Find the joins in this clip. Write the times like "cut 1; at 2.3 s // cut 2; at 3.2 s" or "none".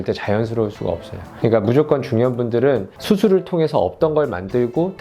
cut 1; at 1.4 s